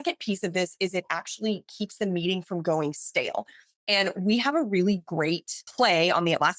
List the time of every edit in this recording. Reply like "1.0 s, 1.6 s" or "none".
5.6 s